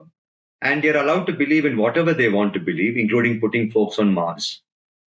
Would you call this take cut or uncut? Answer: uncut